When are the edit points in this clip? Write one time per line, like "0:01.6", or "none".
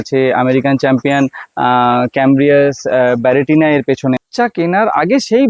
0:04.2